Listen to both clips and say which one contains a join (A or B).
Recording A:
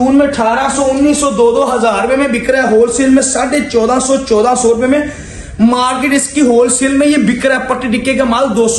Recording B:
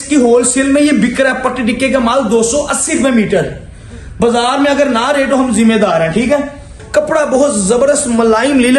B